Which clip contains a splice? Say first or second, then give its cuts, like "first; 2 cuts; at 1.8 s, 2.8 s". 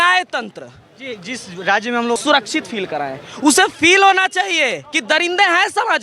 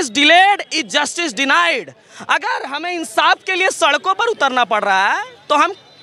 first; 1 cut; at 2.2 s